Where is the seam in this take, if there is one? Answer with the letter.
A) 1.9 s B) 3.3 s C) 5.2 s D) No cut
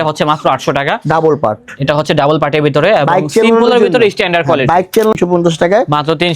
C